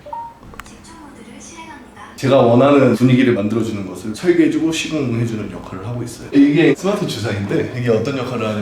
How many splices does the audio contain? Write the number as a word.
two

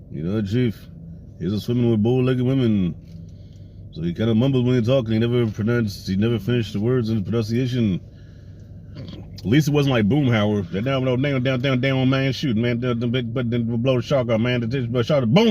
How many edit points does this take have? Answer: one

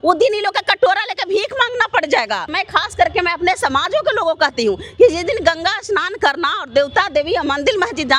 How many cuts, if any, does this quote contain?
one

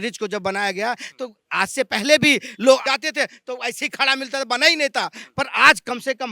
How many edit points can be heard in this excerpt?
one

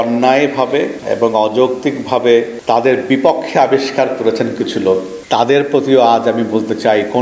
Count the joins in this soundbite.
three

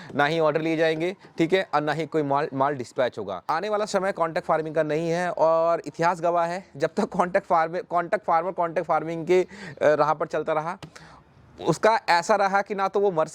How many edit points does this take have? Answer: one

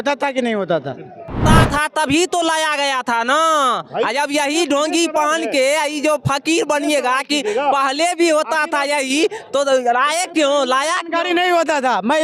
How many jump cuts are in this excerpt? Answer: one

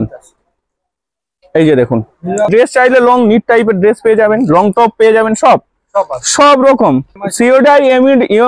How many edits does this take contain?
two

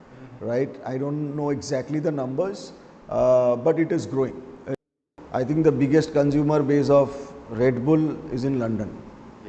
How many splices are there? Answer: one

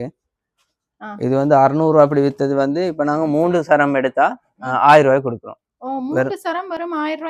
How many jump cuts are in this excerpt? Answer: zero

